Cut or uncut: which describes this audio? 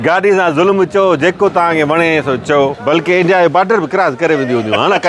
cut